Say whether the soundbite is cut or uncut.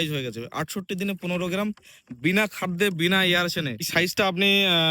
cut